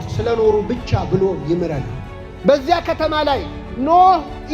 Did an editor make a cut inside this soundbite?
yes; 1 cut; at 2.5 s

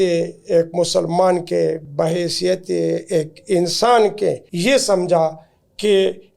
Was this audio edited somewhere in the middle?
yes; 2 cuts; at 1.9 s, 4.5 s

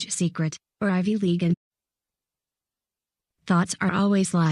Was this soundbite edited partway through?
no; 0 cuts

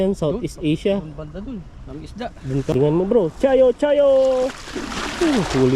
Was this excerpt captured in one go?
no; 1 cut; at 2.7 s

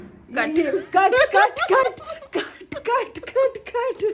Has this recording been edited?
no; 0 cuts

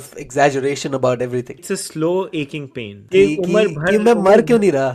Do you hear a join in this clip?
yes; 2 cuts; at 1.7 s, 3.0 s

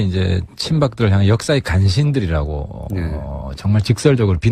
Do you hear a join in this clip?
no; 0 cuts

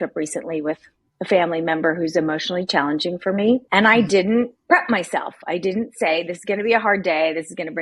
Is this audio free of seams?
no; 1 cut; at 3.7 s

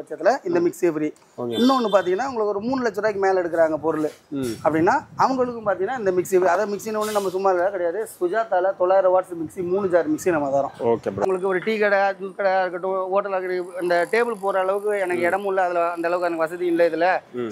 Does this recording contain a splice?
yes; 1 cut; at 11.2 s

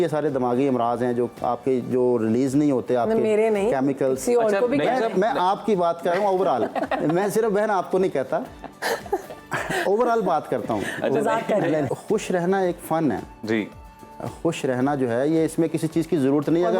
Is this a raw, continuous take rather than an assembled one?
no; 1 cut; at 11.9 s

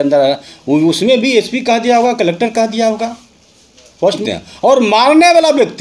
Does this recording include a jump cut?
yes; 1 cut; at 4.2 s

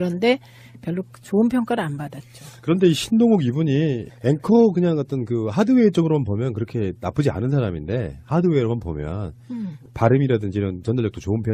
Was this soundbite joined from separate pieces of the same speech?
yes; 1 cut; at 3.5 s

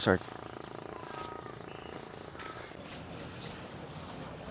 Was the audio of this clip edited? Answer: yes; 1 cut; at 2.5 s

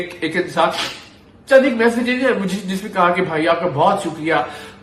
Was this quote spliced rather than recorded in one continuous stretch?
no; 0 cuts

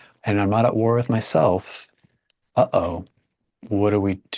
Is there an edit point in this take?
no; 0 cuts

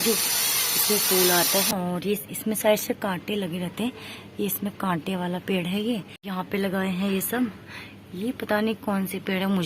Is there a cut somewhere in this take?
yes; 2 cuts; at 1.7 s, 6.1 s

